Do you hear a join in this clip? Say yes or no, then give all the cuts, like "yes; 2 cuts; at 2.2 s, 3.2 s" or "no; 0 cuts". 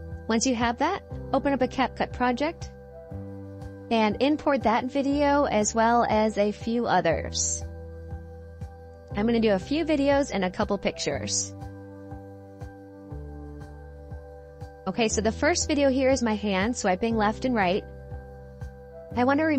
yes; 4 cuts; at 7.3 s, 9.2 s, 11.4 s, 14.7 s